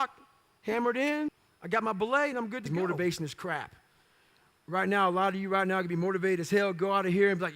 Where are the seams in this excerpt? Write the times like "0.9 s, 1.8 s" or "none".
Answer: 1.5 s, 2.7 s